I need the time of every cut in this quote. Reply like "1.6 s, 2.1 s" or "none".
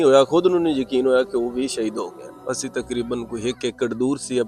2.3 s